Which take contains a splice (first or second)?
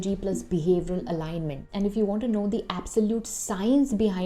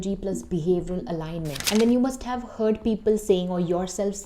second